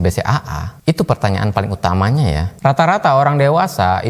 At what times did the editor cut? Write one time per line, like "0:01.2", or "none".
none